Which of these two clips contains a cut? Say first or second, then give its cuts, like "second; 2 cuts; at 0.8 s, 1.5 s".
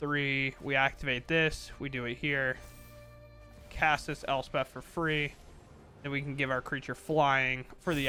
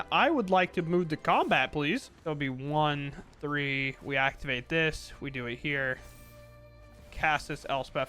second; 1 cut; at 2.1 s